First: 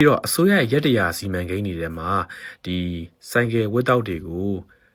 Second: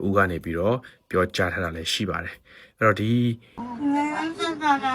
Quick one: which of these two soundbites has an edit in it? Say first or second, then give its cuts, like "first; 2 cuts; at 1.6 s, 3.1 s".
second; 1 cut; at 3.7 s